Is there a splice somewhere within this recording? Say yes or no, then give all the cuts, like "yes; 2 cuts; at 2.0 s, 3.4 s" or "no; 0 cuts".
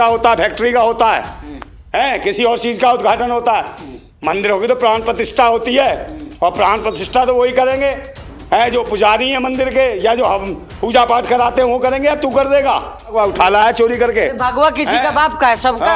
yes; 1 cut; at 13.1 s